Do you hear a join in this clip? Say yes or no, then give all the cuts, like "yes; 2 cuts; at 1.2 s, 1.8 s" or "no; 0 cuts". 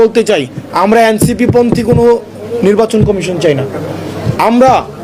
no; 0 cuts